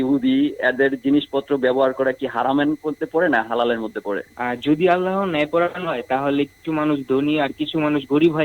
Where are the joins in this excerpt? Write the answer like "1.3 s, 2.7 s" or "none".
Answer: 4.3 s